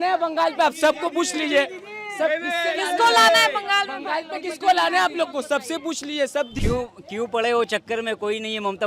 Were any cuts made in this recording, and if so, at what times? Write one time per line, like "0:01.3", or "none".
0:06.5